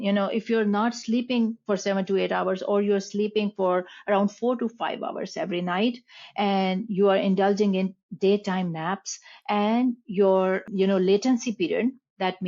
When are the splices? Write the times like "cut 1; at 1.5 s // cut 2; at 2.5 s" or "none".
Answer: cut 1; at 10.7 s